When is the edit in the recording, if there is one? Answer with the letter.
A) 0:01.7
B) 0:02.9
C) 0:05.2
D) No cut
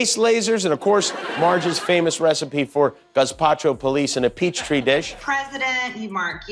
C